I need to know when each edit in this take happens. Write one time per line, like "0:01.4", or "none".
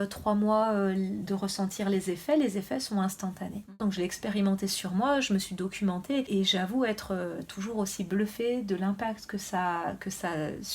0:03.8
0:06.3